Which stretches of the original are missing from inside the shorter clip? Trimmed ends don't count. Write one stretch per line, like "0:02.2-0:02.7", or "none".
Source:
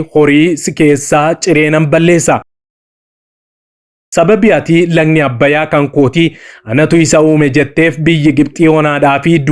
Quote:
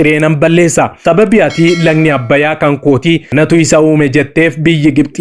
0:02.5-0:04.1
0:06.4-0:06.7

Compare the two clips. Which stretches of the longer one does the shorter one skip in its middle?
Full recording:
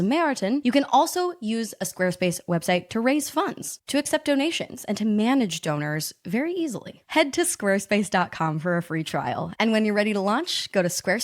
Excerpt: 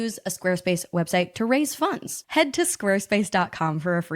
0:03.7-0:06.9

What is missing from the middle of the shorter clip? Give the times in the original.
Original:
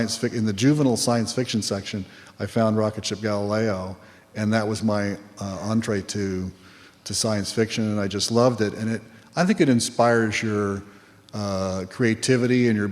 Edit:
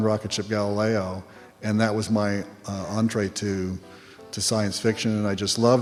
none

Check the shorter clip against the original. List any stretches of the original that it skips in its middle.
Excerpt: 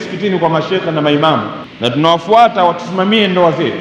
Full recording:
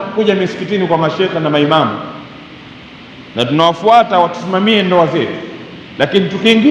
0:02.1-0:03.2

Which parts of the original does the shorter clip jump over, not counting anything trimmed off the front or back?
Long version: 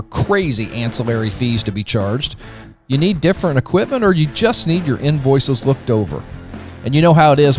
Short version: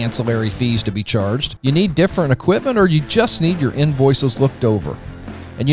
0:02.3-0:02.8

